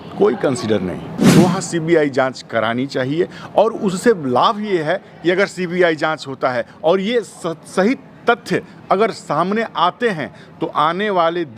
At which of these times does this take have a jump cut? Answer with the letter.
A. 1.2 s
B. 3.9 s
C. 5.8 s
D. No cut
A